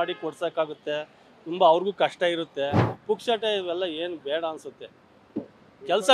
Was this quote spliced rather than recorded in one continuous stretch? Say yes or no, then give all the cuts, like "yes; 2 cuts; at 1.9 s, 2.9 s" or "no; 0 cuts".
yes; 1 cut; at 2.9 s